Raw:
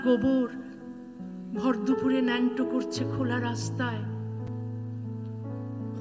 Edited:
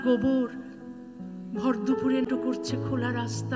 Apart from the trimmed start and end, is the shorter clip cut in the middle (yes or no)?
yes